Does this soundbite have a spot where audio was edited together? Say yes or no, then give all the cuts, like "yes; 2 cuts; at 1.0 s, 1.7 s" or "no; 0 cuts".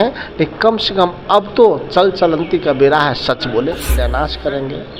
yes; 1 cut; at 4.0 s